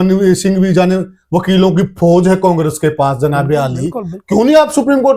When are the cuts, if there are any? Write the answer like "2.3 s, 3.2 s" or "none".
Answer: none